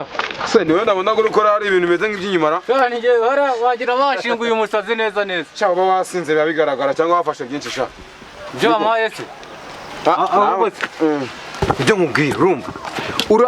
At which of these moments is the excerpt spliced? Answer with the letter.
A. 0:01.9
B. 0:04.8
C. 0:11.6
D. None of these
C